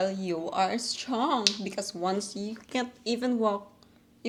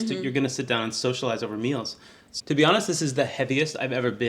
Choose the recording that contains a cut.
second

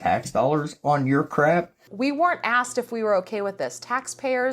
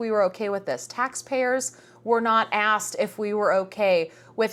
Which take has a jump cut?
first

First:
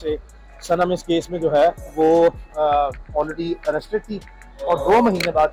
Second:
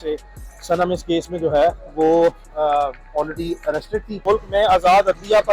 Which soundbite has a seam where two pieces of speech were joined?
second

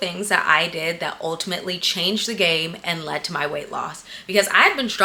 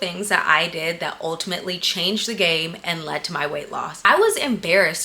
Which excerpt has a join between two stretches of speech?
second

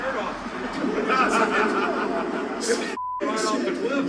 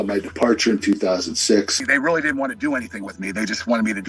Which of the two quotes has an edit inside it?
second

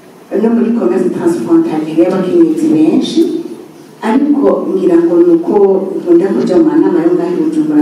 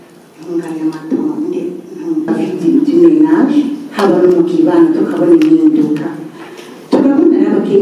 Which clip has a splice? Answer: second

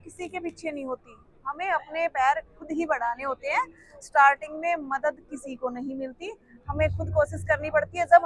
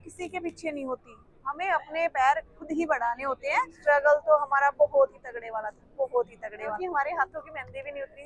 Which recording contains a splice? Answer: second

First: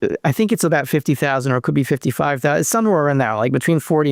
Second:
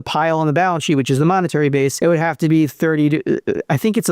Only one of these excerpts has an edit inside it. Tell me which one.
second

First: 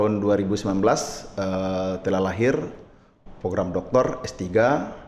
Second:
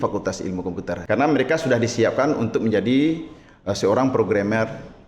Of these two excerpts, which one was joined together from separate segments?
second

